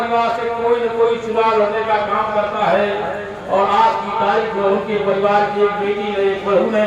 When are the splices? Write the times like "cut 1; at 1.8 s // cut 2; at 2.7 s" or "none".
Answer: cut 1; at 5.6 s

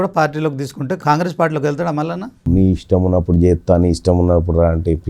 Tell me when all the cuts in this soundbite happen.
cut 1; at 1.0 s // cut 2; at 2.4 s

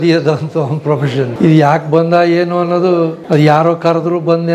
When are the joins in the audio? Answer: cut 1; at 1.3 s // cut 2; at 3.2 s

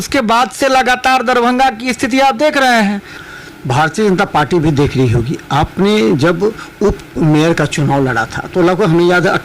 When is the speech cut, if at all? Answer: cut 1; at 3.2 s

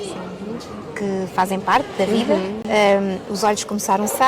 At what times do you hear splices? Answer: cut 1; at 2.6 s

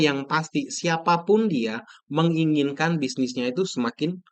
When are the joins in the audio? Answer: none

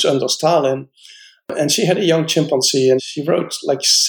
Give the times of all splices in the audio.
cut 1; at 3.1 s

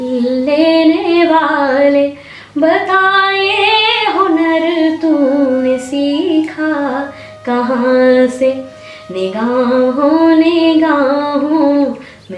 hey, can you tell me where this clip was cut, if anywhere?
none

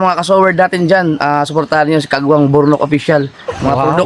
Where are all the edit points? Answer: none

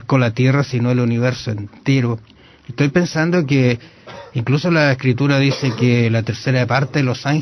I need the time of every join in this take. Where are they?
cut 1; at 2.6 s

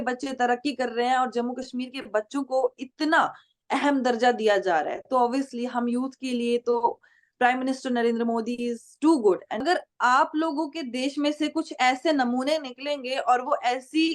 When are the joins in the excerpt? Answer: cut 1; at 9.6 s

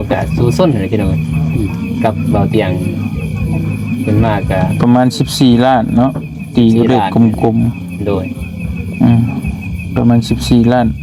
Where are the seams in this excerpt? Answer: none

